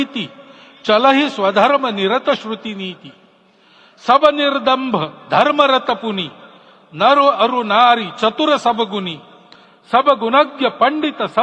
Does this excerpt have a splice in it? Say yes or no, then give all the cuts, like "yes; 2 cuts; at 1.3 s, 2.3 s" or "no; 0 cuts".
no; 0 cuts